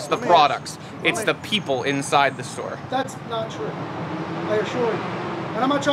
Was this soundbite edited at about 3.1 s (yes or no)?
no